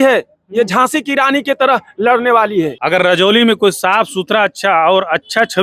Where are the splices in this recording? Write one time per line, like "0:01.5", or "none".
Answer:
0:02.8